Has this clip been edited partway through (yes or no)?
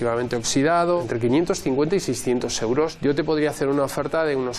yes